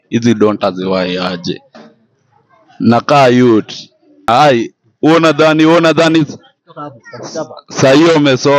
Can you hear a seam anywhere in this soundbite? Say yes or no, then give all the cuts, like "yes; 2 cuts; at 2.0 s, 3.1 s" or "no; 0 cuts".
yes; 1 cut; at 4.3 s